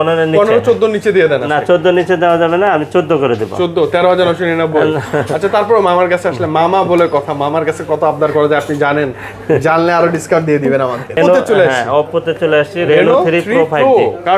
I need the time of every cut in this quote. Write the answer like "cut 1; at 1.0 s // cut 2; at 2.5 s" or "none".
none

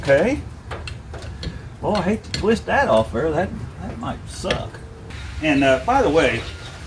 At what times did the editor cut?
cut 1; at 5.1 s

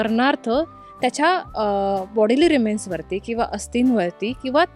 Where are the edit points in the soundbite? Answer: none

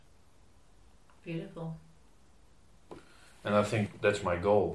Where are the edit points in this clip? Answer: cut 1; at 3.9 s

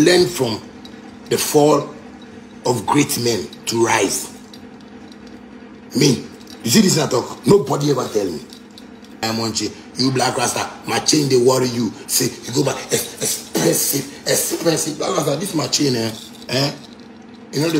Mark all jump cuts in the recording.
cut 1; at 9.2 s

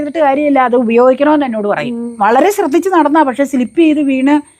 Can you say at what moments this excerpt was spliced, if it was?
cut 1; at 2.1 s

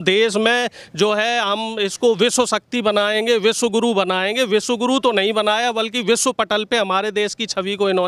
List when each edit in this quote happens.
none

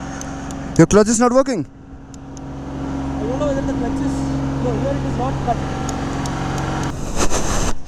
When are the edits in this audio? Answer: cut 1; at 6.9 s

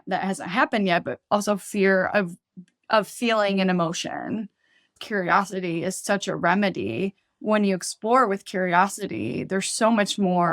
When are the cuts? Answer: cut 1; at 5.0 s

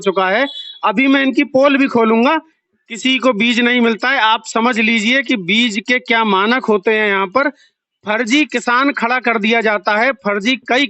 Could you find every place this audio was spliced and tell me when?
cut 1; at 2.6 s

